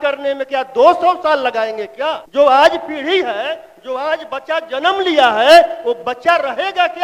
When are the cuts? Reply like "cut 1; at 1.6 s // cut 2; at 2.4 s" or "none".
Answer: cut 1; at 2.2 s